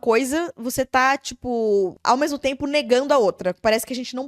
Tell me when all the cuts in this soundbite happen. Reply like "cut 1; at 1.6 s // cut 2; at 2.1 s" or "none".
cut 1; at 2.0 s